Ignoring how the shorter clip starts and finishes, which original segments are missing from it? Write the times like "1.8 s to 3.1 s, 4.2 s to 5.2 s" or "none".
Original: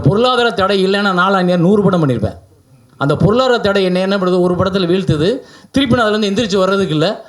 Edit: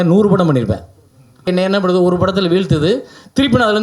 3.0 s to 3.8 s